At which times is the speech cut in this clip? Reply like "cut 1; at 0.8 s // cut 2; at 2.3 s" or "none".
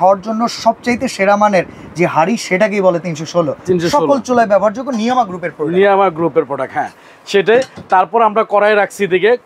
none